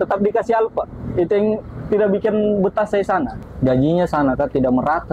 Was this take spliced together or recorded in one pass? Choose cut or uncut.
cut